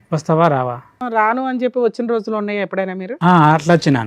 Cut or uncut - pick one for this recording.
cut